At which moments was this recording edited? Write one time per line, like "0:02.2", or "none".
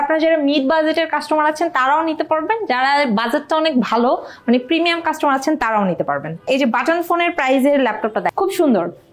0:06.4
0:08.3